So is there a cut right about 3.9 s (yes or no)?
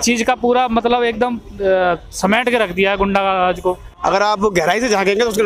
yes